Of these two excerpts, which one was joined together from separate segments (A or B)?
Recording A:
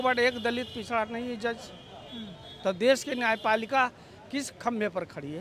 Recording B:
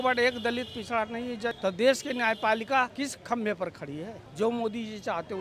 B